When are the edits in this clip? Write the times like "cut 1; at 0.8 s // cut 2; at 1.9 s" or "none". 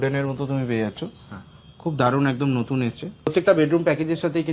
cut 1; at 3.3 s

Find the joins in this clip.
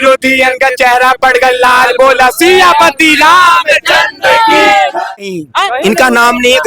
cut 1; at 5.1 s

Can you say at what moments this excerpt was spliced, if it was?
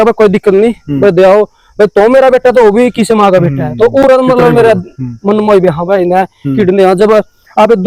none

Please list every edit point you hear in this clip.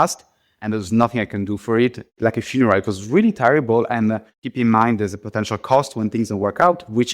cut 1; at 2.1 s // cut 2; at 4.3 s

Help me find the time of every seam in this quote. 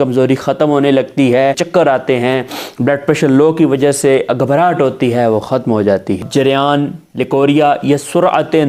cut 1; at 1.6 s // cut 2; at 6.2 s

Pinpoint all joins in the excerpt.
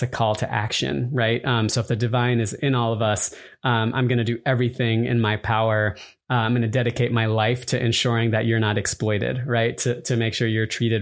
none

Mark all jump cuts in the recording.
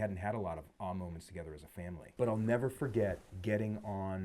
cut 1; at 2.1 s // cut 2; at 3.3 s

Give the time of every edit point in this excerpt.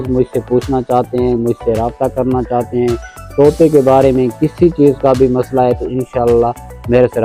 none

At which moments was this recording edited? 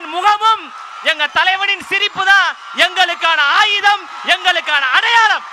none

